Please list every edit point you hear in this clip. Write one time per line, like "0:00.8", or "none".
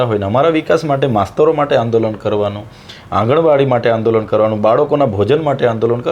none

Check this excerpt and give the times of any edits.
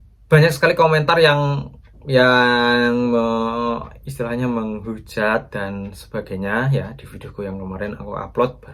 none

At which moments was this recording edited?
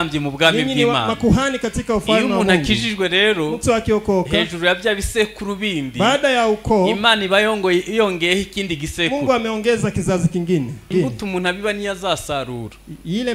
0:10.9

